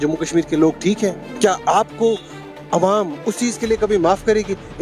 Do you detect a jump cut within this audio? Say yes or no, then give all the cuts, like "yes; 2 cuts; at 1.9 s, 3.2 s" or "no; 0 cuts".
yes; 1 cut; at 1.2 s